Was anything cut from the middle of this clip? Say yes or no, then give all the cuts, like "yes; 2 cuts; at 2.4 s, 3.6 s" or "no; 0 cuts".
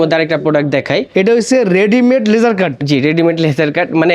no; 0 cuts